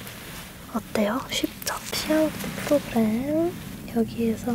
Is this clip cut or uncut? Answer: cut